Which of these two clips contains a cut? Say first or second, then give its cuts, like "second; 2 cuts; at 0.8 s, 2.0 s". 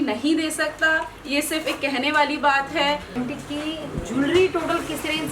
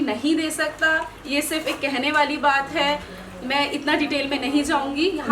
first; 1 cut; at 3.1 s